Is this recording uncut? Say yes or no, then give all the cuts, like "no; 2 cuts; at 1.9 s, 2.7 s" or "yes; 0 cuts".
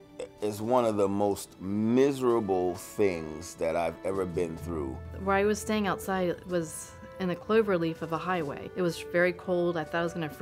no; 2 cuts; at 5.1 s, 8.6 s